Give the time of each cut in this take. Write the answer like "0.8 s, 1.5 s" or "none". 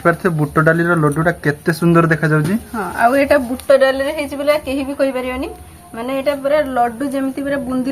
none